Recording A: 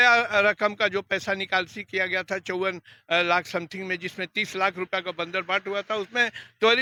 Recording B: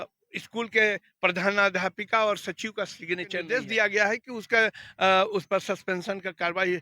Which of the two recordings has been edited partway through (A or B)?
B